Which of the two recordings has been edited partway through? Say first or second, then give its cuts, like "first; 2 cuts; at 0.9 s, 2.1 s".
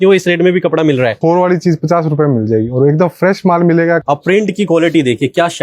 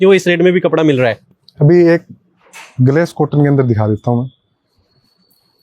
first; 2 cuts; at 1.2 s, 4.0 s